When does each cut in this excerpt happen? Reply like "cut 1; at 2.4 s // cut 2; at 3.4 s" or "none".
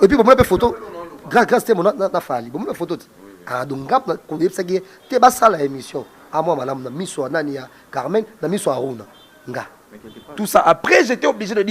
cut 1; at 10.3 s